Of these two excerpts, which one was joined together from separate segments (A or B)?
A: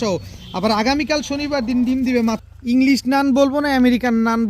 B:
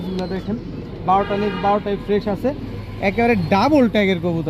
A